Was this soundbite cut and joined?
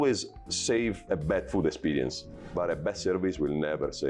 yes; 2 cuts; at 1.0 s, 2.5 s

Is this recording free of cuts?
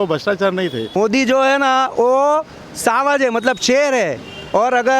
no; 1 cut; at 1.0 s

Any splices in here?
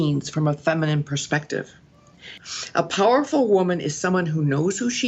yes; 1 cut; at 1.9 s

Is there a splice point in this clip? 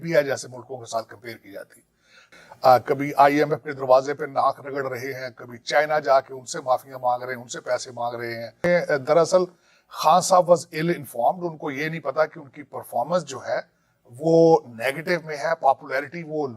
yes; 2 cuts; at 2.2 s, 8.5 s

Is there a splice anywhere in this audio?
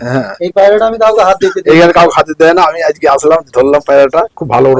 no; 0 cuts

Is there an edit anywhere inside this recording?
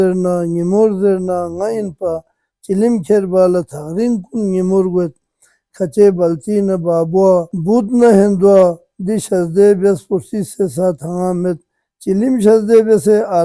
no; 0 cuts

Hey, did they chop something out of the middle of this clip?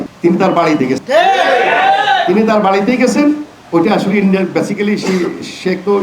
no; 0 cuts

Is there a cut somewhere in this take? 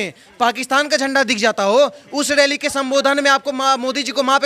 no; 0 cuts

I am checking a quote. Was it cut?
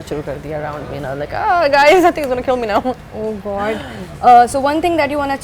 no; 0 cuts

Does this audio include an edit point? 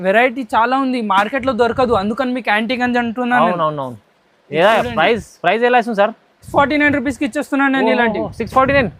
no; 0 cuts

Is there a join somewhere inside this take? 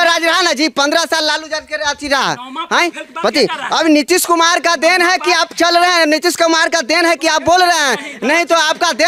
no; 0 cuts

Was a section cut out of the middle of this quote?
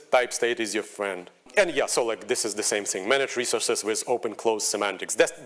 yes; 1 cut; at 1.4 s

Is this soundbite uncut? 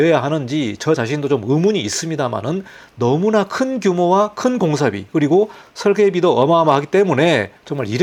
yes; 0 cuts

